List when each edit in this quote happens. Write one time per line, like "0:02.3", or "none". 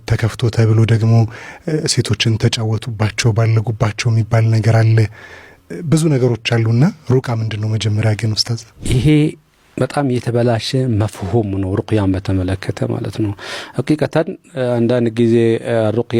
none

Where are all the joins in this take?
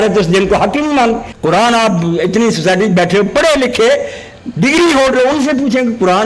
0:01.3

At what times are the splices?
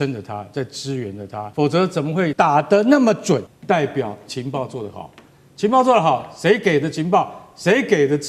0:01.5
0:02.3
0:03.5

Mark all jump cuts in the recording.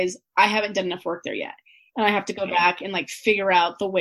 none

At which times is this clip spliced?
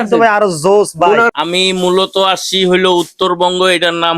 0:01.3

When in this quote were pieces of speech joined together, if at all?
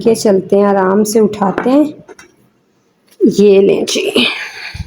none

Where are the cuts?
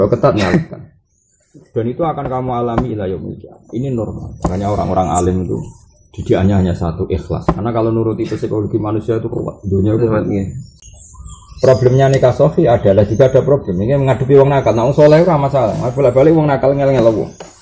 0:10.6

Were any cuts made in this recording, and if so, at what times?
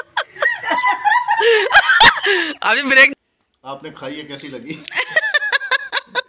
0:03.1

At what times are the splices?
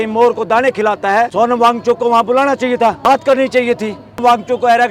0:01.3
0:03.0
0:04.2

